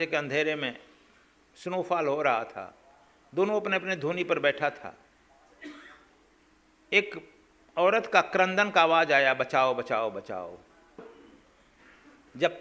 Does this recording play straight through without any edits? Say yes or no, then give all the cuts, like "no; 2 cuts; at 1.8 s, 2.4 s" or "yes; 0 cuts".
no; 1 cut; at 11.0 s